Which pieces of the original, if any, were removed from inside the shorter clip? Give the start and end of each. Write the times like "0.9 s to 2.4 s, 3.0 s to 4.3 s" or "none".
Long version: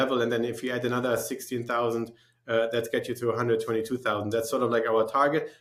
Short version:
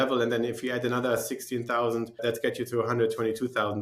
2.2 s to 2.7 s